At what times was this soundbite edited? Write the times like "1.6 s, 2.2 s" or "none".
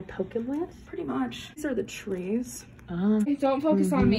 1.6 s, 3.3 s